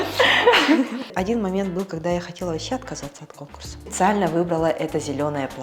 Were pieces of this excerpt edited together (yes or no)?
yes